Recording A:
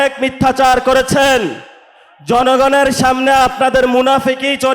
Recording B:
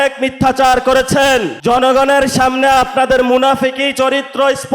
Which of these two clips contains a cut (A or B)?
B